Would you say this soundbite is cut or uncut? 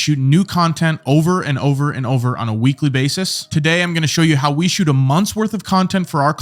uncut